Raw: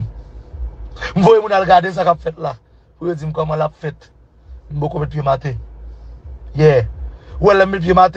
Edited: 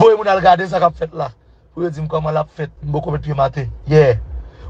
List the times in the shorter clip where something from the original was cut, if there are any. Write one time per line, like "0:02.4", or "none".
0:02.8
0:03.7